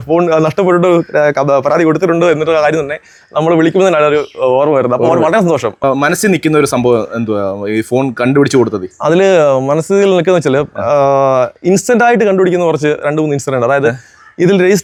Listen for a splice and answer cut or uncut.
uncut